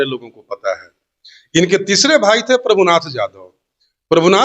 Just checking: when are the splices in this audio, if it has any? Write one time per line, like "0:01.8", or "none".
none